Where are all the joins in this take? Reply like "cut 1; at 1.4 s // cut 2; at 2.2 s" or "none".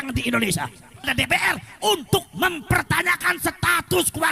cut 1; at 1.1 s